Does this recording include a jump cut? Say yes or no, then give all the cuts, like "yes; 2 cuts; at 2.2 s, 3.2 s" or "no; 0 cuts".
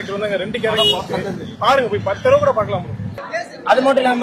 yes; 1 cut; at 3.2 s